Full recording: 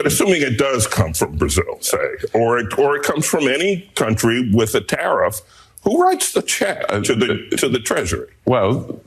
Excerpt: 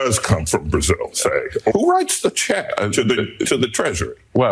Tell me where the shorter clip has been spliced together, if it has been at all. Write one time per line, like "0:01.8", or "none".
0:01.7